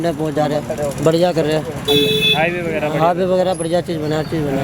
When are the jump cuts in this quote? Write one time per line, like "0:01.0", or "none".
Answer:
none